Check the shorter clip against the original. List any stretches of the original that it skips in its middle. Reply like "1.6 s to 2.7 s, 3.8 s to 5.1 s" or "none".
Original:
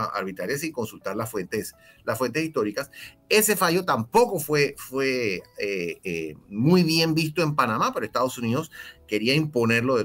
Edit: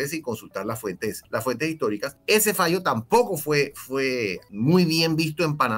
1.7 s to 2.0 s, 2.9 s to 3.2 s, 5.5 s to 6.4 s